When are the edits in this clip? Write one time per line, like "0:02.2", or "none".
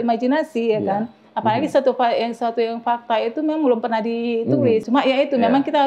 0:04.8